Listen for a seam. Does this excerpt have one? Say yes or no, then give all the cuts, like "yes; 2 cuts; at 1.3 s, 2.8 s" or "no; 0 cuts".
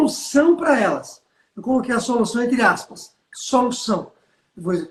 no; 0 cuts